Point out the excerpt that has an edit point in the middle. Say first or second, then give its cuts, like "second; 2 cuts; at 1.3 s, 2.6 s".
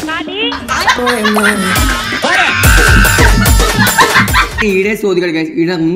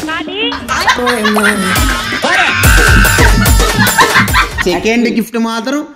second; 1 cut; at 4.6 s